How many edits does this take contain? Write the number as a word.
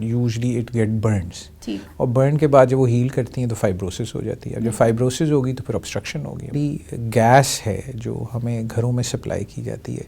one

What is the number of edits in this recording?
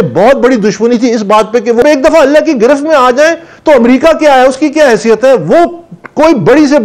one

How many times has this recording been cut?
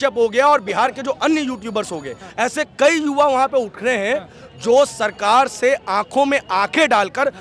one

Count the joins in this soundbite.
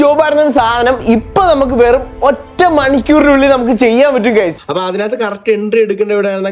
one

